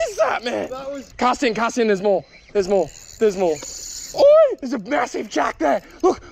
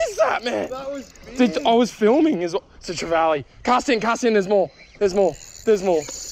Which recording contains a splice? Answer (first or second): first